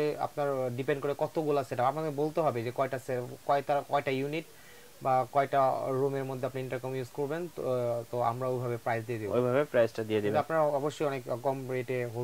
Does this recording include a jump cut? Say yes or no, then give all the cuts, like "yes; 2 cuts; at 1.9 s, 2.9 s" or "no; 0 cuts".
no; 0 cuts